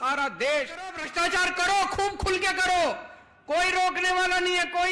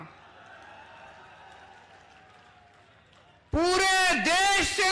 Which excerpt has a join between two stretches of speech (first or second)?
first